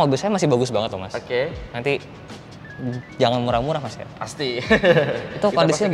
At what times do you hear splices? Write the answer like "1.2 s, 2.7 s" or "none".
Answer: none